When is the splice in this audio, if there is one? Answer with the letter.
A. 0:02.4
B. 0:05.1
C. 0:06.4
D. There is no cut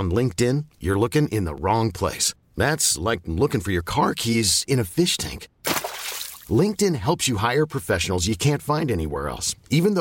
D